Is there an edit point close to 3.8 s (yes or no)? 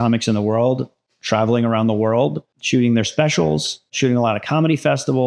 no